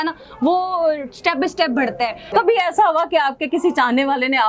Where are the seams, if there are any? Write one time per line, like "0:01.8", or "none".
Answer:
0:02.3